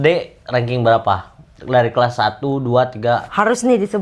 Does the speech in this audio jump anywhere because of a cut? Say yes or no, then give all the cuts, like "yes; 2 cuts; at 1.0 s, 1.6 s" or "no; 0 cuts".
no; 0 cuts